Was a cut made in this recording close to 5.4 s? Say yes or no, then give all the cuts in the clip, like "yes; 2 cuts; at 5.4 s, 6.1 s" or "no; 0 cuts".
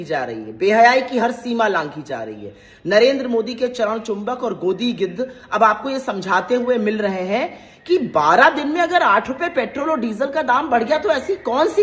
no; 0 cuts